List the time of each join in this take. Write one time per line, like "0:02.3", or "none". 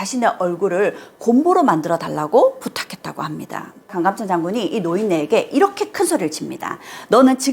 0:03.9